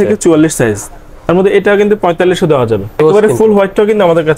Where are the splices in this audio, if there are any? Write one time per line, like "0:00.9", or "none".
0:02.9